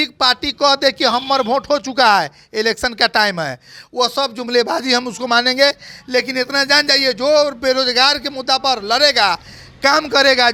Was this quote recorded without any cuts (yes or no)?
yes